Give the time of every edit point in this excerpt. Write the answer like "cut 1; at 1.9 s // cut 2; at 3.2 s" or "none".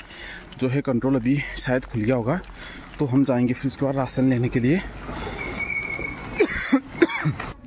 none